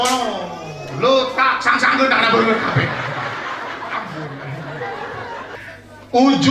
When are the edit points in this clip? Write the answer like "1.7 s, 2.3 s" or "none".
5.5 s